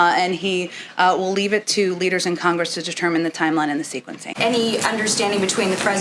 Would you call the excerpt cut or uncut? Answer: cut